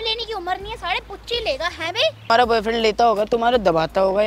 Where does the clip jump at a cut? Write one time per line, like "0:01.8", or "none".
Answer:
0:02.3

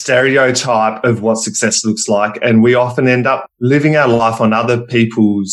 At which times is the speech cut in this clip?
none

